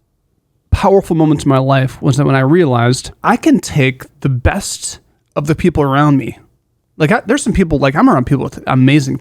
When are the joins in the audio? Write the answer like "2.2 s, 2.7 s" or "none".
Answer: 3.1 s